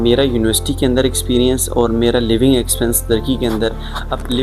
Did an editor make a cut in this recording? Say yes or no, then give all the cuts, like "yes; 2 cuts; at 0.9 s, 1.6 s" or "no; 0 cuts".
no; 0 cuts